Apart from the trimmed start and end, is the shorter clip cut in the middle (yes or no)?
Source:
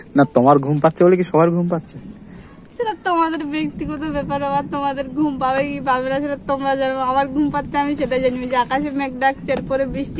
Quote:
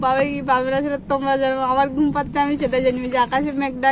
no